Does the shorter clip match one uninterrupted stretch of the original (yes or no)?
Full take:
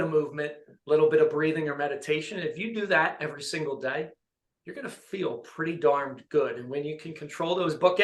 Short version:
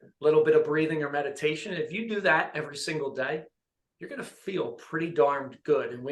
yes